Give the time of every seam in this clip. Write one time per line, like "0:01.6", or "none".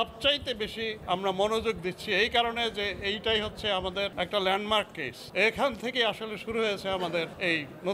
0:05.1